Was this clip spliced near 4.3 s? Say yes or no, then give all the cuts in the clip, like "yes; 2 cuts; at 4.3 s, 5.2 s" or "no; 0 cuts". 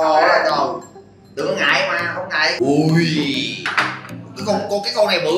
no; 0 cuts